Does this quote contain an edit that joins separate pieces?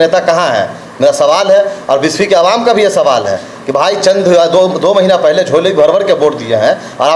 no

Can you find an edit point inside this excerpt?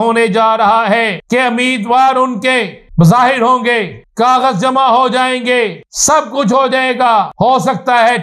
yes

